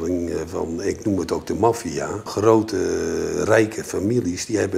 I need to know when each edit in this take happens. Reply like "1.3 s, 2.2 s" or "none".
2.3 s